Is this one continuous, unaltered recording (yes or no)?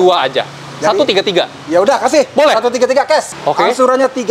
no